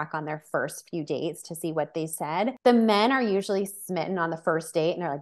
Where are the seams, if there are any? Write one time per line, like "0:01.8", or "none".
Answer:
0:02.6